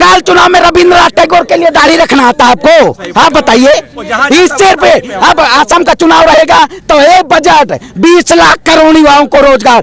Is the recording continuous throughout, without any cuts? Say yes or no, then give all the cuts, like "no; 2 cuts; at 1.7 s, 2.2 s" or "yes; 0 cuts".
yes; 0 cuts